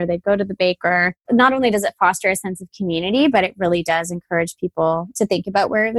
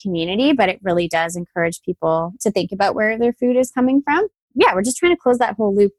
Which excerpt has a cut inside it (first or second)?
second